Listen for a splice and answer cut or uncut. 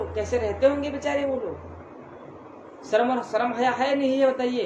uncut